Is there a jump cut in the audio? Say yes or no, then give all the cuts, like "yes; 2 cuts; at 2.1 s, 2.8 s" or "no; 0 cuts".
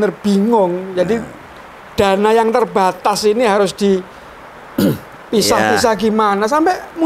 no; 0 cuts